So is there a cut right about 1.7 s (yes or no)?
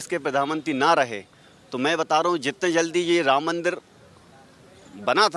no